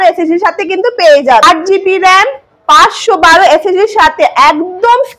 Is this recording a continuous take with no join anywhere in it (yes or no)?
no